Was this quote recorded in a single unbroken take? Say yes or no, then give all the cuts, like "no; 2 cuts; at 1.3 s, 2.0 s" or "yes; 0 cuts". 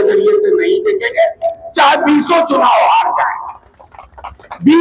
yes; 0 cuts